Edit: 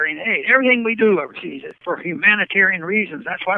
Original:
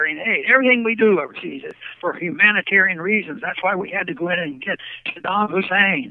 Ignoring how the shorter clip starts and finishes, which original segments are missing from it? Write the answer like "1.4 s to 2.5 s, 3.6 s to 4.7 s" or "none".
1.7 s to 1.9 s